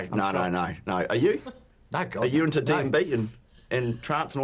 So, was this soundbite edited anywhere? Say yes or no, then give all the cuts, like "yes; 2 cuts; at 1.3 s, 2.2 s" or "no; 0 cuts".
no; 0 cuts